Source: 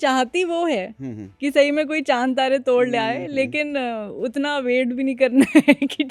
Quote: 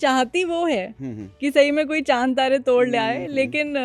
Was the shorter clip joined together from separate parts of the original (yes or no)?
no